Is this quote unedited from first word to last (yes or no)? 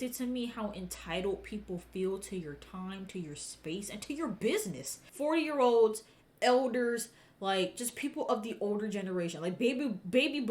no